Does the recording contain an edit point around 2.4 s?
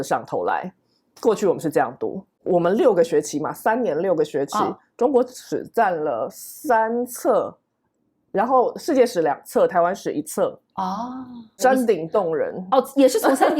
yes; 2 cuts; at 2.4 s, 11.5 s

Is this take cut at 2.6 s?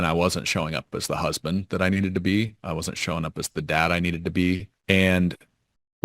no; 1 cut; at 4.7 s

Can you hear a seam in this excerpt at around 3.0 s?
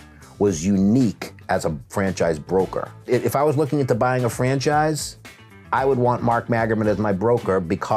yes; 1 cut; at 3.0 s

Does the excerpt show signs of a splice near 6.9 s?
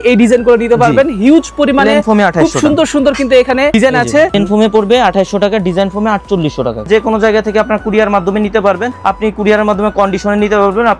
yes; 3 cuts; at 3.9 s, 6.9 s, 8.9 s

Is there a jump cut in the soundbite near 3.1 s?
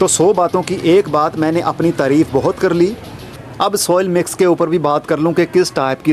no; 0 cuts

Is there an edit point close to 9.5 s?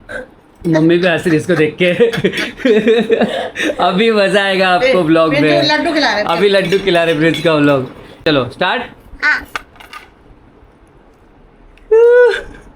no; 1 cut; at 8.2 s

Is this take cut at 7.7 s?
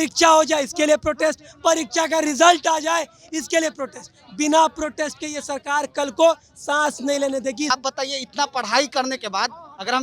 yes; 1 cut; at 7.7 s

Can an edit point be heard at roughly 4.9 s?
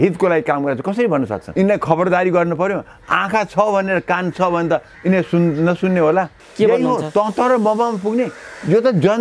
no; 2 cuts; at 1.4 s, 6.4 s

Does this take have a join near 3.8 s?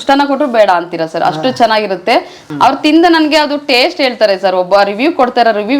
no; 1 cut; at 2.4 s

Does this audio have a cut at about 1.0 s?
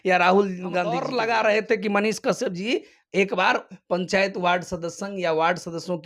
yes; 1 cut; at 1.0 s

